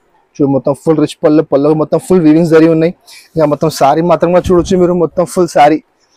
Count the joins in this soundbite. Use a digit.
0